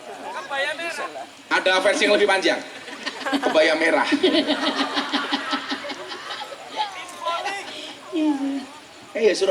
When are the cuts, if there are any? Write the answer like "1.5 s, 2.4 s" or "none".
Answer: none

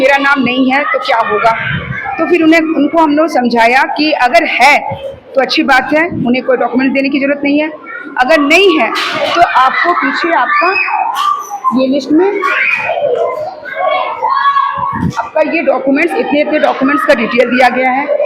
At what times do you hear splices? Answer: none

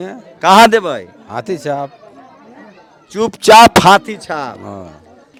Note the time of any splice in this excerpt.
none

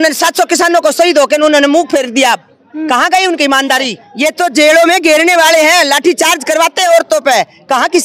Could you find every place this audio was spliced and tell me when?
4.0 s

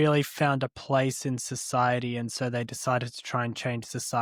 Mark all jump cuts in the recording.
none

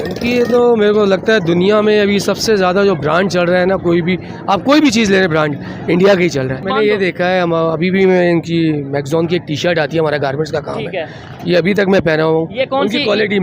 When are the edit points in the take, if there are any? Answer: 6.6 s

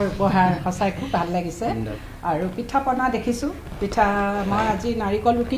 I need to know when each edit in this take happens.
none

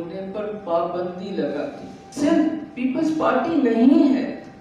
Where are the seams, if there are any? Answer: 2.1 s

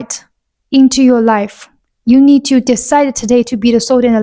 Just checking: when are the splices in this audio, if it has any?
none

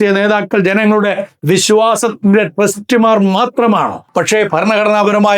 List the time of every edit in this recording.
4.0 s

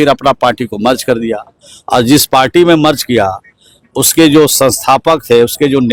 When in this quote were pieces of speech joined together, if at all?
none

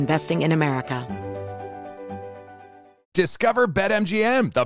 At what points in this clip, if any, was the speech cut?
1.0 s, 3.0 s

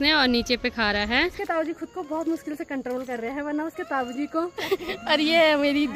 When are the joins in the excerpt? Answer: 1.4 s, 4.6 s

